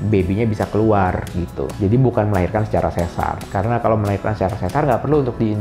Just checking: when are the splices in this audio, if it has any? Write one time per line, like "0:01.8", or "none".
none